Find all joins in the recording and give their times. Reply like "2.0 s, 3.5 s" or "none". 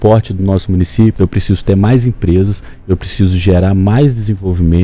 1.1 s